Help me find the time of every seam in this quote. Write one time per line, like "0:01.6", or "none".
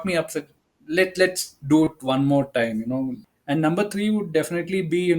0:03.2